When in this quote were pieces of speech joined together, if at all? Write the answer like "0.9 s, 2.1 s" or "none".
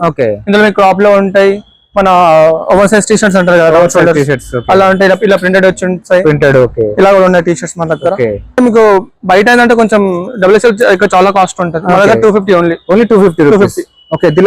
8.6 s